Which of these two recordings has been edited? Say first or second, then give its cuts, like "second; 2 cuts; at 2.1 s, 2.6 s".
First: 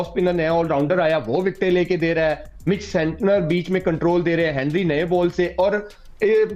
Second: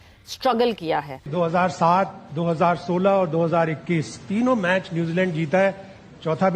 second; 1 cut; at 1.3 s